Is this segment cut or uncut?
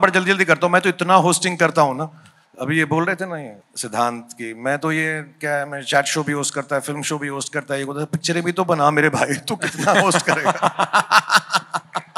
uncut